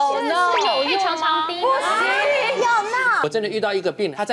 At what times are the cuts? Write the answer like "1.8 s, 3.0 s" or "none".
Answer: 3.2 s